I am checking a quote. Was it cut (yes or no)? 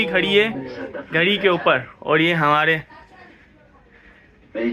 no